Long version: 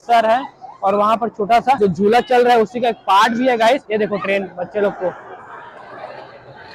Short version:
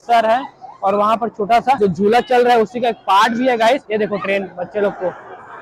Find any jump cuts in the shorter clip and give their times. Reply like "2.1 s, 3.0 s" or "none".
none

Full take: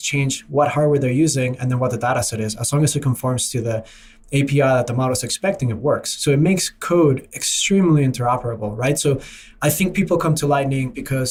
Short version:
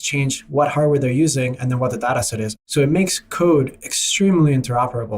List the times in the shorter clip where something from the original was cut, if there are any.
2.6 s

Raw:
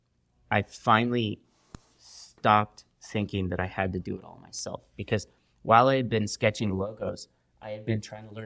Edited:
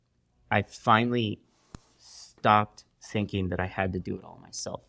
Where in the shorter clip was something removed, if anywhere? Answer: none

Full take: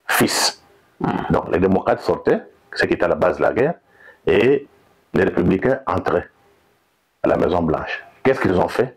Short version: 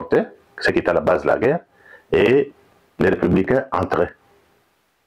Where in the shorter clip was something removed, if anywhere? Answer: none

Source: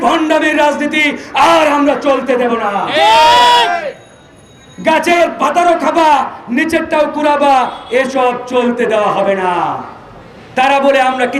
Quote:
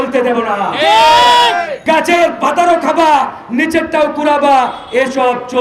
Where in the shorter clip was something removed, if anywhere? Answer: 1.7 s

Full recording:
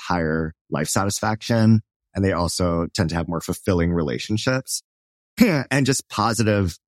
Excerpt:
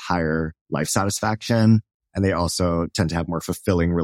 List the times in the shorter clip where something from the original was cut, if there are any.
none

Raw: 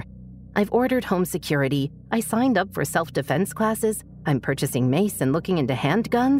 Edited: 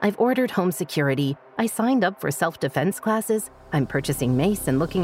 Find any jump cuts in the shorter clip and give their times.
none

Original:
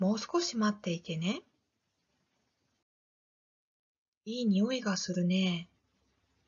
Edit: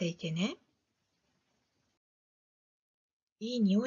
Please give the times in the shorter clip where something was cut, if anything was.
none

